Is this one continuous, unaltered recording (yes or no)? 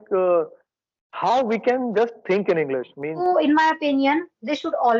no